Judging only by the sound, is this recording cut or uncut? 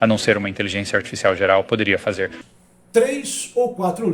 cut